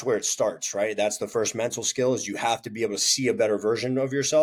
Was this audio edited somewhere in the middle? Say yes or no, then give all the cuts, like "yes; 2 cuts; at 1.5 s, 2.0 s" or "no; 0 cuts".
no; 0 cuts